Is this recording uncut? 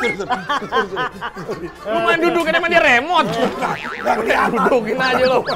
yes; 0 cuts

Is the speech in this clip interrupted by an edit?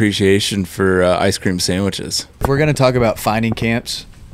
yes; 1 cut; at 2.4 s

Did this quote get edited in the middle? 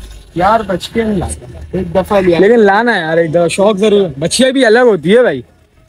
no; 0 cuts

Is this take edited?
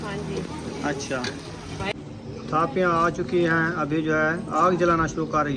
yes; 1 cut; at 1.9 s

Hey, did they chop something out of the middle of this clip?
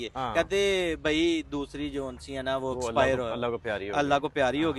no; 0 cuts

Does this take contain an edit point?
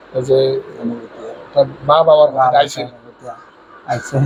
no; 0 cuts

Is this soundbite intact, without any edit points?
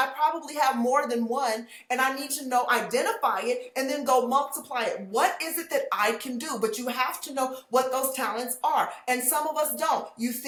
yes; 0 cuts

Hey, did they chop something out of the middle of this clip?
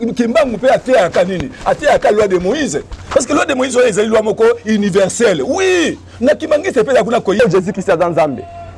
yes; 1 cut; at 7.4 s

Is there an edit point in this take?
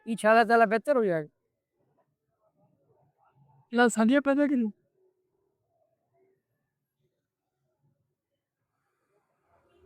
no; 0 cuts

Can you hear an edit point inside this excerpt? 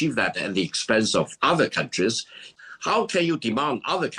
yes; 1 cut; at 2.4 s

